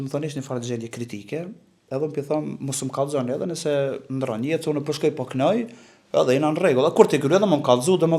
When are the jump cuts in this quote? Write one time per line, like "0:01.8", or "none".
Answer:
none